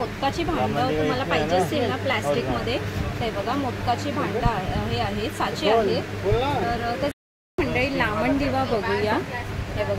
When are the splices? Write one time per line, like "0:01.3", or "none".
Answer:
none